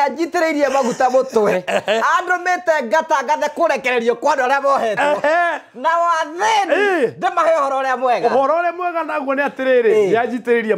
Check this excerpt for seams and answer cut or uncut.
uncut